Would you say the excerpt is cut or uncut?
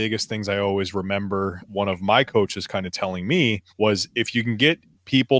cut